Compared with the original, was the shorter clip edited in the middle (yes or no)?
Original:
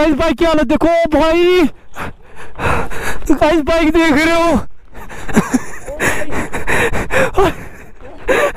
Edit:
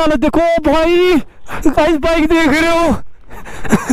yes